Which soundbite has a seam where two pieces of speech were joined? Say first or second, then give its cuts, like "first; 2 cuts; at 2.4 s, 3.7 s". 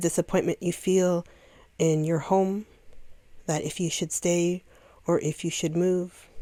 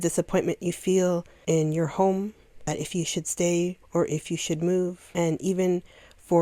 second; 4 cuts; at 1.3 s, 2.7 s, 3.8 s, 5.0 s